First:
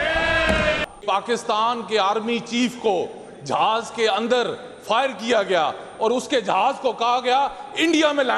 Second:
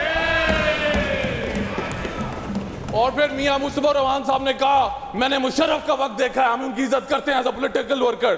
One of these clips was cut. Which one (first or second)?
first